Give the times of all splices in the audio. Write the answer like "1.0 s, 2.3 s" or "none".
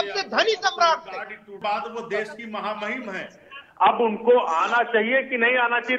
1.5 s